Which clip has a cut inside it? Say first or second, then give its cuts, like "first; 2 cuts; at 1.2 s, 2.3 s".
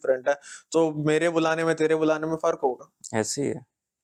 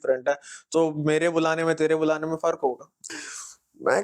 second; 1 cut; at 2.9 s